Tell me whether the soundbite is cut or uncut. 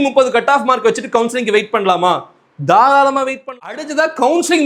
cut